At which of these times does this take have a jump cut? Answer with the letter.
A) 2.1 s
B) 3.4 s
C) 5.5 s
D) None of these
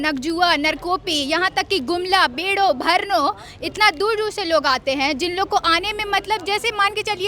D